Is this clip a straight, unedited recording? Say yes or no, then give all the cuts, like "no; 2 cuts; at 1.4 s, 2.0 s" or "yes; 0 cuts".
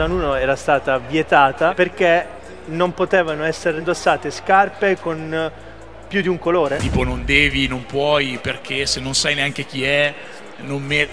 no; 3 cuts; at 1.8 s, 3.8 s, 6.8 s